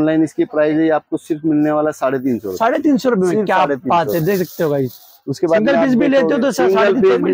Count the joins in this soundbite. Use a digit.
0